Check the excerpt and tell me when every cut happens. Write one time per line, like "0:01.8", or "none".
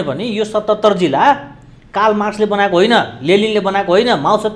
none